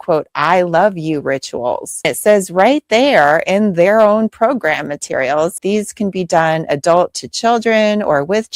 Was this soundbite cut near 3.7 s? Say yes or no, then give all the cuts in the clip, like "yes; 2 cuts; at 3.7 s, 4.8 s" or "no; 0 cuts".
no; 2 cuts; at 2.1 s, 5.6 s